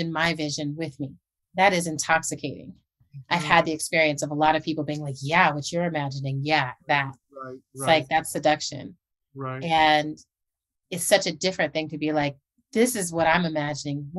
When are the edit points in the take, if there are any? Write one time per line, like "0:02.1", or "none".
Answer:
0:01.4
0:03.1